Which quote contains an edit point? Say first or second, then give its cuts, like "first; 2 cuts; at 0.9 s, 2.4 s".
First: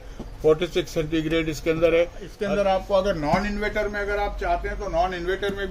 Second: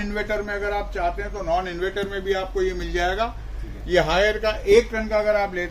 first; 1 cut; at 2.3 s